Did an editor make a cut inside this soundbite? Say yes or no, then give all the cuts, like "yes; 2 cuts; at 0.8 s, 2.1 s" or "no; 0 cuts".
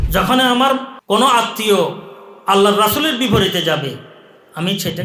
yes; 1 cut; at 0.9 s